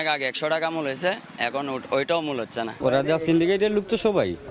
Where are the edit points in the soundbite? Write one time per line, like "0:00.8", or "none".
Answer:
0:02.7

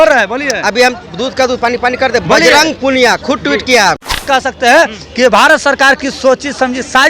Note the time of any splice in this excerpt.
0:04.1

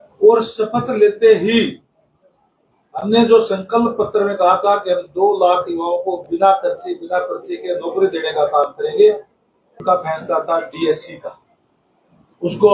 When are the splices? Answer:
0:09.8

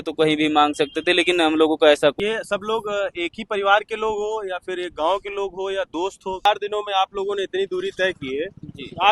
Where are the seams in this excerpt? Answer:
0:02.1
0:06.2

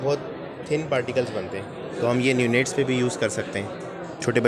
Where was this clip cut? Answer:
none

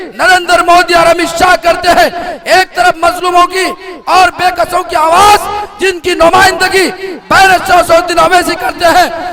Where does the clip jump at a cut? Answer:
none

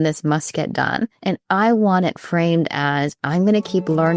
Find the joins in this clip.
0:01.2

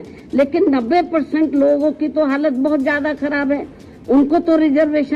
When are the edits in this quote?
none

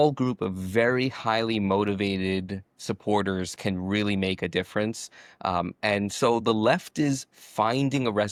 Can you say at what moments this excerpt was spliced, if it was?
none

